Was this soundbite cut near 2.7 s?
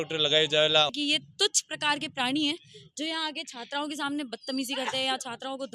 no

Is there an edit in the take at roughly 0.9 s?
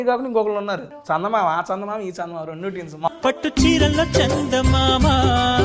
yes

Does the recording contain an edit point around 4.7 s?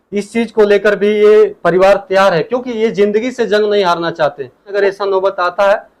yes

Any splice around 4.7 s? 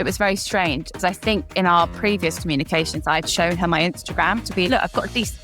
yes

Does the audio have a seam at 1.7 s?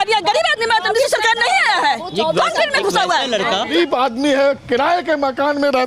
no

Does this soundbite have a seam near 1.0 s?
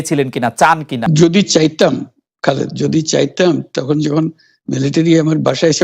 yes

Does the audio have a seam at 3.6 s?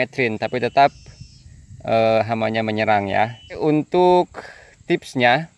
yes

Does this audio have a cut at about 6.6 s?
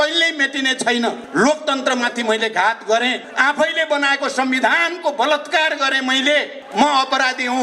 yes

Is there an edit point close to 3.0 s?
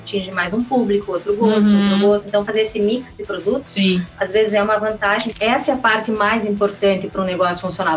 no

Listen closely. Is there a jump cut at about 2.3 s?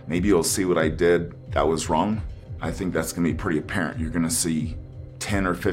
yes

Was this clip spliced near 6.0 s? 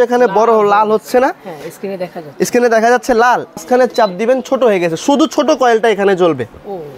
no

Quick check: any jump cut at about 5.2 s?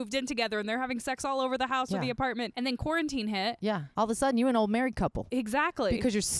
yes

